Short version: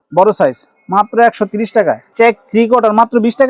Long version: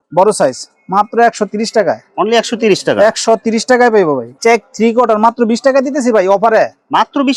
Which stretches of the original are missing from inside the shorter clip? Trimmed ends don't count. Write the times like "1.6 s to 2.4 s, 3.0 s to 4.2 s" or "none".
2.1 s to 4.3 s